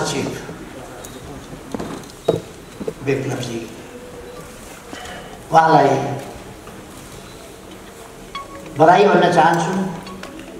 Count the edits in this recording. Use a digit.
0